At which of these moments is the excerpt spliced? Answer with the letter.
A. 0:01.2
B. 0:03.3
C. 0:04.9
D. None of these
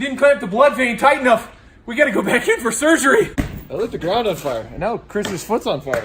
B